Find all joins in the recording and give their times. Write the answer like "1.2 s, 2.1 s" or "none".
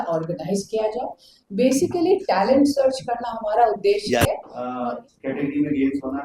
4.5 s